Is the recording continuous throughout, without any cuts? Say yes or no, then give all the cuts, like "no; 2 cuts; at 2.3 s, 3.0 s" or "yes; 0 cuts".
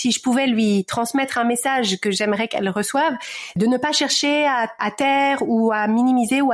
no; 2 cuts; at 3.6 s, 4.8 s